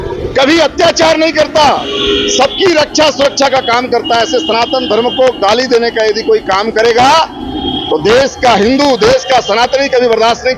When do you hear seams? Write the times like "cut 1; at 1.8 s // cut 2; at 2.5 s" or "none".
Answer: none